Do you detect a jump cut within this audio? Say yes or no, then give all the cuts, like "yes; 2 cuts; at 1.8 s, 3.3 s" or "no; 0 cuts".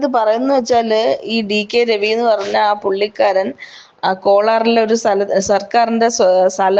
no; 0 cuts